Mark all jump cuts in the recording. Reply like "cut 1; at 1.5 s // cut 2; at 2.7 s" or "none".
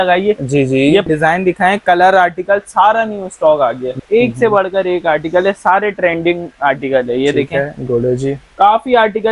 cut 1; at 1.0 s // cut 2; at 4.0 s // cut 3; at 8.4 s